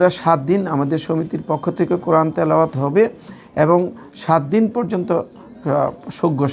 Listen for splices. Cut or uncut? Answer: uncut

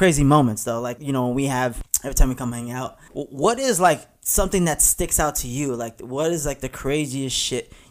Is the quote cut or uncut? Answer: cut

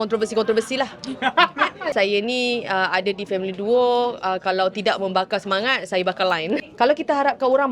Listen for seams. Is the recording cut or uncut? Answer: cut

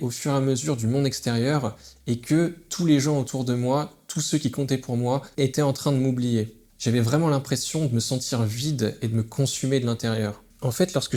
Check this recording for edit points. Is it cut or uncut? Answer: uncut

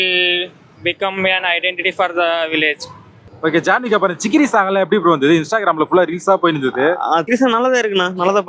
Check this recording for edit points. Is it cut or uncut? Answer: cut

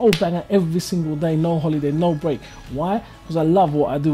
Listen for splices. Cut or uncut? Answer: uncut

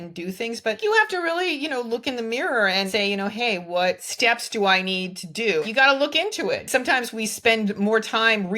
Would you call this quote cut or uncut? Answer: cut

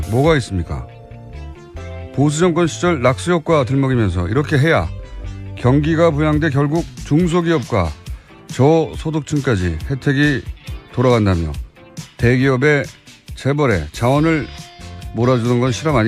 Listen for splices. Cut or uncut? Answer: cut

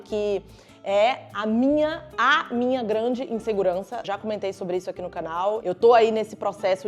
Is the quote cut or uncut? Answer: uncut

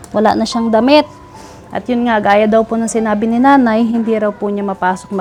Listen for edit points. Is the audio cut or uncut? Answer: uncut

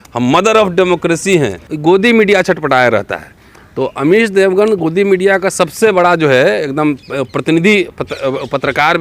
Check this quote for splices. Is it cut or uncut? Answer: cut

